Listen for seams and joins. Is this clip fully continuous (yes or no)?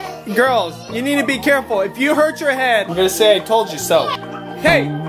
yes